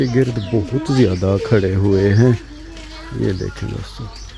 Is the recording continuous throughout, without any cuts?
yes; 0 cuts

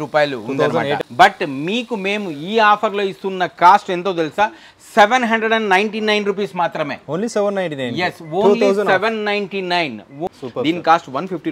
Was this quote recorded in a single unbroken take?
no; 2 cuts; at 1.0 s, 10.3 s

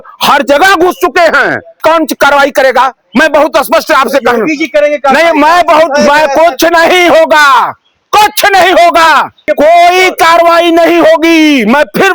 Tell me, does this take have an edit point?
yes; 2 cuts; at 1.8 s, 9.4 s

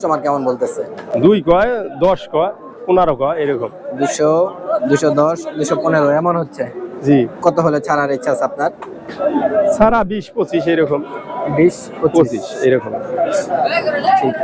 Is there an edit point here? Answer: no; 0 cuts

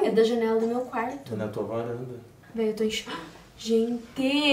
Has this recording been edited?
yes; 1 cut; at 2.3 s

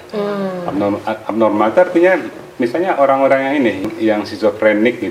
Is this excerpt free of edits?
no; 1 cut; at 3.8 s

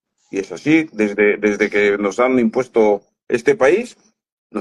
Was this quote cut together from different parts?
no; 0 cuts

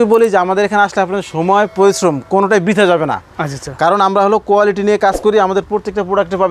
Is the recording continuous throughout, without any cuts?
yes; 0 cuts

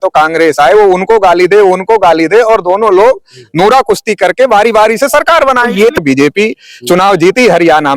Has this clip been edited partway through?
yes; 1 cut; at 6.0 s

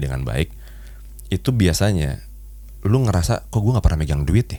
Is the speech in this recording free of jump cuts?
yes; 0 cuts

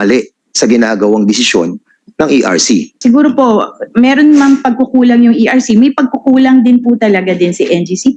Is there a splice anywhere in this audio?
yes; 1 cut; at 2.9 s

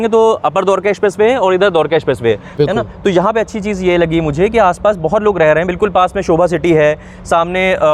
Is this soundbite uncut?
no; 1 cut; at 2.6 s

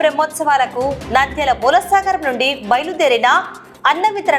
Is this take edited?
no; 0 cuts

